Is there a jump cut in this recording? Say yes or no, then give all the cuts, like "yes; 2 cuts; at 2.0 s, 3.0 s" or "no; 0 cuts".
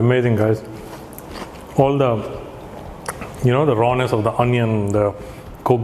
no; 0 cuts